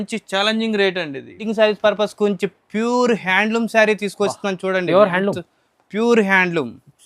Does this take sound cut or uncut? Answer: cut